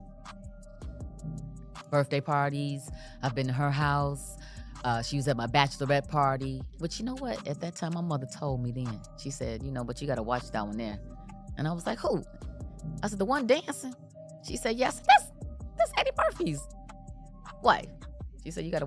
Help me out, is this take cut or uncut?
cut